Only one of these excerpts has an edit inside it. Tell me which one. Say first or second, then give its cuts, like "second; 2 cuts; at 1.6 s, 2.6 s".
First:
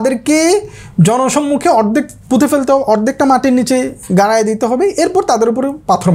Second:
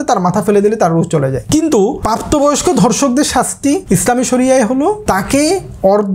second; 4 cuts; at 1.4 s, 2.0 s, 3.8 s, 5.0 s